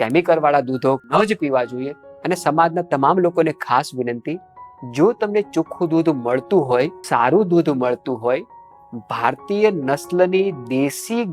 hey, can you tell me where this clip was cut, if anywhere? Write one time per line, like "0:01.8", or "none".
0:01.1
0:02.0
0:07.0